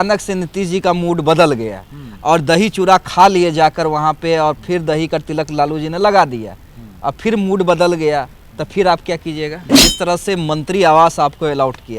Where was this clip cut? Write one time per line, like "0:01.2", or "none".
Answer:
0:09.7